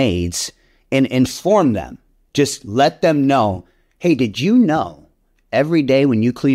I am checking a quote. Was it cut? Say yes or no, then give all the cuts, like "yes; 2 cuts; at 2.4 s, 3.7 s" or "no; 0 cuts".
no; 0 cuts